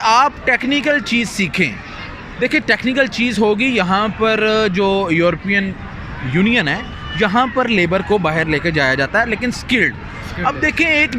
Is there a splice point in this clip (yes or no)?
no